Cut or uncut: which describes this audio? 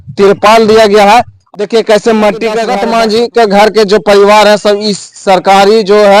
cut